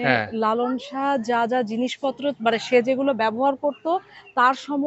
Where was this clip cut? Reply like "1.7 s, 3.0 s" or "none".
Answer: none